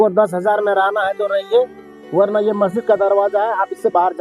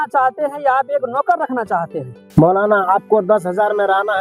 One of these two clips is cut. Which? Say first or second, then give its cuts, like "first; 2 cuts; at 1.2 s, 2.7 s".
second; 1 cut; at 2.1 s